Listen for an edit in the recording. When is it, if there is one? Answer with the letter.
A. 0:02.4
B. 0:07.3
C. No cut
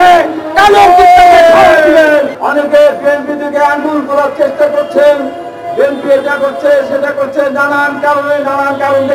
A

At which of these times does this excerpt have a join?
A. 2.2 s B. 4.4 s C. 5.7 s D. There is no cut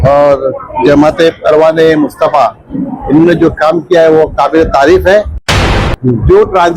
C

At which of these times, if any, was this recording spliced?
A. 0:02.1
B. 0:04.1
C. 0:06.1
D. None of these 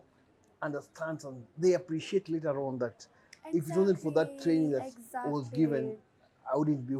D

